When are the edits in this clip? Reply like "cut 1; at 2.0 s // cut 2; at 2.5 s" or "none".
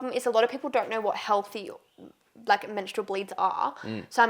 none